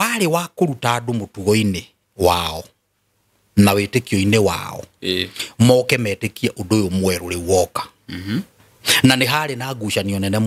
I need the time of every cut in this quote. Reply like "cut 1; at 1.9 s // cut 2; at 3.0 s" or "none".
none